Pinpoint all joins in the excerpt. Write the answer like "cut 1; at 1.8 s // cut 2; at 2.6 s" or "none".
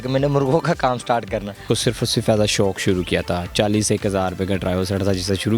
cut 1; at 1.6 s